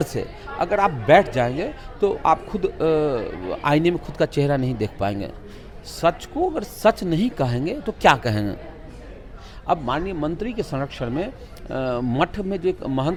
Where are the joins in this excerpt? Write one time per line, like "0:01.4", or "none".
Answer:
none